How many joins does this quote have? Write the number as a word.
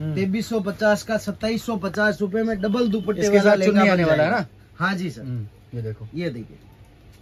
zero